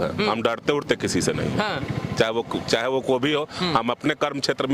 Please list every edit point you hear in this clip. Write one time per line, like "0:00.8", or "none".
none